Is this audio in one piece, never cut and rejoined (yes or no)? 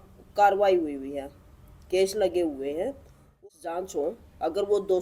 no